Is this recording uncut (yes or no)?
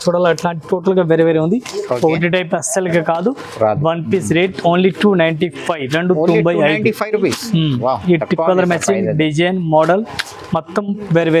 yes